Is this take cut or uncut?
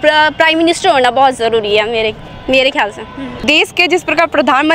cut